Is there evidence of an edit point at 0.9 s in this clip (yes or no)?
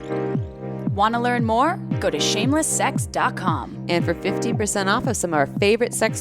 yes